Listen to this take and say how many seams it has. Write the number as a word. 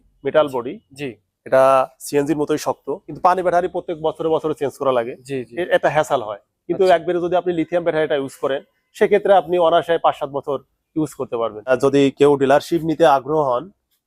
two